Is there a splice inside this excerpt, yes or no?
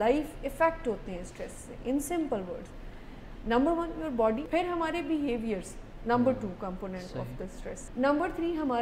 yes